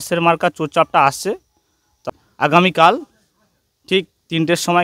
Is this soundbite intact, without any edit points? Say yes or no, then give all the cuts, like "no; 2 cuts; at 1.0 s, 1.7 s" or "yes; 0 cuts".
no; 1 cut; at 2.0 s